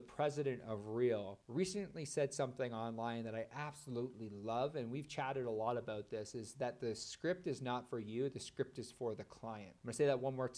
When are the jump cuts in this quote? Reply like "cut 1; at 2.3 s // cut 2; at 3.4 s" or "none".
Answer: cut 1; at 1.4 s

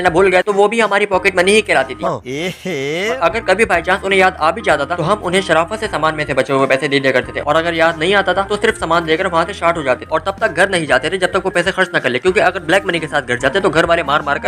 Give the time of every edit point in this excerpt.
none

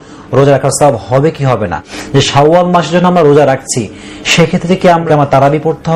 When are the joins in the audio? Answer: cut 1; at 1.9 s // cut 2; at 5.1 s

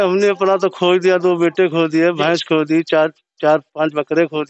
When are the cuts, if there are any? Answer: none

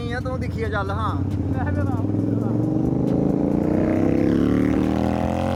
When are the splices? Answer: none

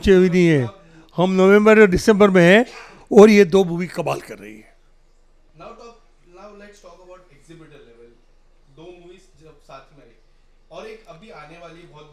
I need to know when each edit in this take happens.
none

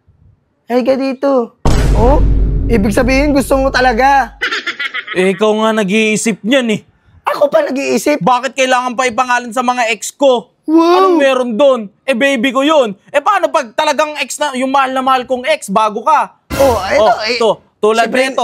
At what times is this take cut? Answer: none

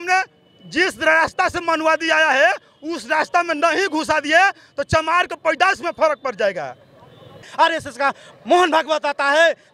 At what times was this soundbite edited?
cut 1; at 7.5 s

